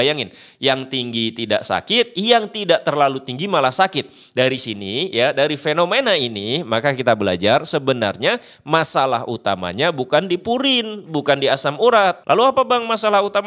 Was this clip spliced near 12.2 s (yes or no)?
yes